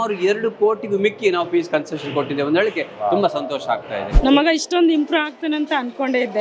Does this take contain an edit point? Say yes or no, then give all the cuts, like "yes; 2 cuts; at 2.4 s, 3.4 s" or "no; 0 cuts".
yes; 1 cut; at 4.1 s